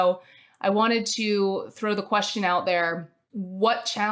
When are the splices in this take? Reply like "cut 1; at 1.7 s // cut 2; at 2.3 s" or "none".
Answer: none